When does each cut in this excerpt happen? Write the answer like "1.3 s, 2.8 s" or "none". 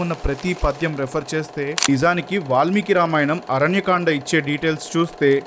1.8 s